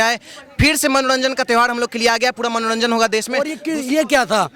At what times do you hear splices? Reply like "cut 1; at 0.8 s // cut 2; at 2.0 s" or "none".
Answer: cut 1; at 3.6 s